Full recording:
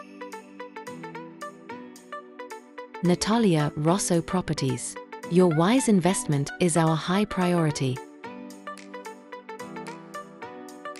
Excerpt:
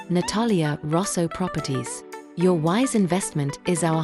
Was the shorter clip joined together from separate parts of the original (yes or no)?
no